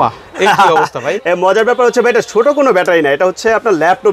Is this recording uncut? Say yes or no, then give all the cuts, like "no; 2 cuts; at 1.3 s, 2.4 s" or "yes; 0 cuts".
yes; 0 cuts